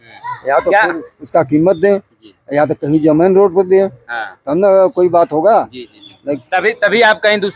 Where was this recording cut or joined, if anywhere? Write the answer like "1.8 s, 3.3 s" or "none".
none